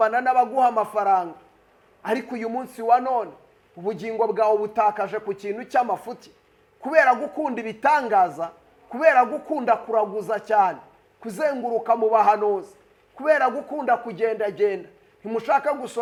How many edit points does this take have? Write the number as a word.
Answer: zero